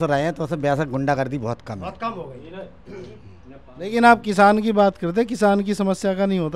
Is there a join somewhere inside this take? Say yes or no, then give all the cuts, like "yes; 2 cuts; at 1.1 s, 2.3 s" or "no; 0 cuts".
no; 0 cuts